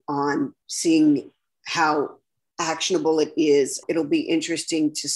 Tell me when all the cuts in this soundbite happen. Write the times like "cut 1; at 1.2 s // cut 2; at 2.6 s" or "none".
cut 1; at 3.8 s